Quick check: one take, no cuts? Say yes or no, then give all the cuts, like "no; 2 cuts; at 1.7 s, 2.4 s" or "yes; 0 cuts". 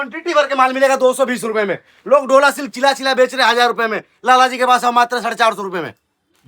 yes; 0 cuts